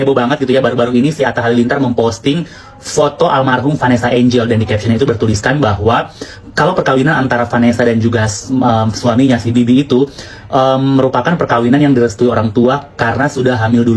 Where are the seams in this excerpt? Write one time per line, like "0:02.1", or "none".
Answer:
none